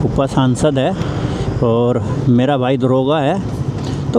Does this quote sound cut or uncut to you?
uncut